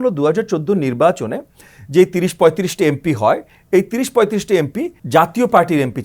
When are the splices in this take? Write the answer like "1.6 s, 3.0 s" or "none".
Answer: 5.0 s